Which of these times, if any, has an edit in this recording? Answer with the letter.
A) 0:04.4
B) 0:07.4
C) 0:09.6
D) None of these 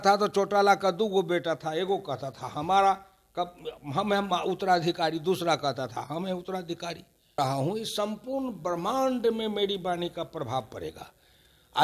B